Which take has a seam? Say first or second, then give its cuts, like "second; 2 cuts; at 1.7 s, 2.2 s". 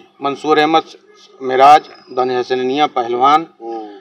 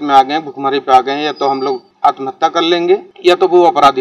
second; 2 cuts; at 1.9 s, 3.1 s